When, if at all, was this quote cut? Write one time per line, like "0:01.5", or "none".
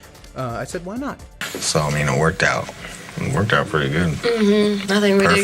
0:01.4

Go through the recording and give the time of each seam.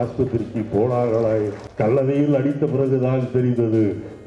0:01.6

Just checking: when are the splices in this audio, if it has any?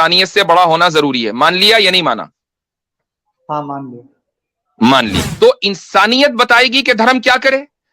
0:05.2

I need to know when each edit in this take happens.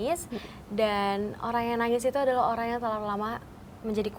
none

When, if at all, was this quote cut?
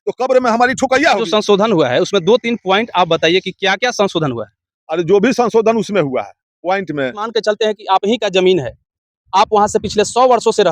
0:01.2
0:07.3

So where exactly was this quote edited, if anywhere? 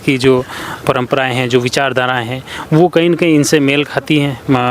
none

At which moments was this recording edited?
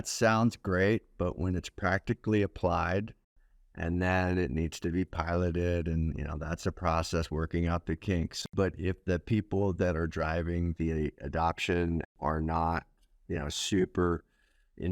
0:03.2
0:08.4
0:12.1

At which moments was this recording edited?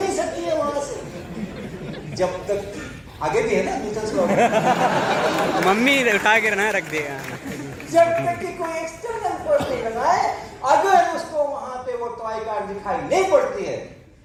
none

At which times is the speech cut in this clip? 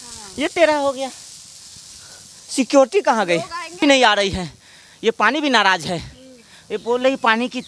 0:03.8

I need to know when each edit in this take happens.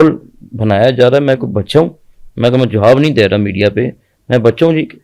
none

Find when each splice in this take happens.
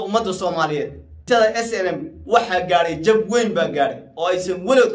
0:01.2

